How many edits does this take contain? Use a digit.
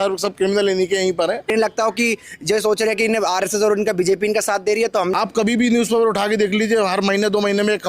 2